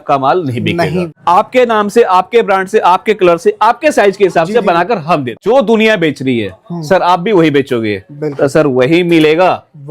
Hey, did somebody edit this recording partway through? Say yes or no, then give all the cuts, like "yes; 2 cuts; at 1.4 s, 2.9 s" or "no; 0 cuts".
yes; 2 cuts; at 1.1 s, 5.3 s